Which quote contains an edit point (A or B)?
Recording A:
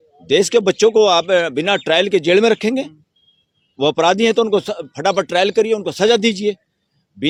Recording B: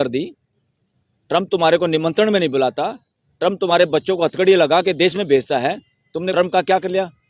B